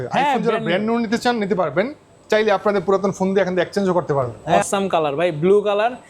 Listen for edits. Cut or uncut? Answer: cut